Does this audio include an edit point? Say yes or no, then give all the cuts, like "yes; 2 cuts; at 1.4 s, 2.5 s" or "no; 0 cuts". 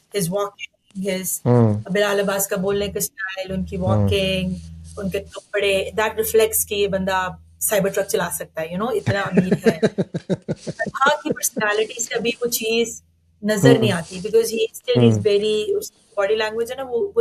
no; 0 cuts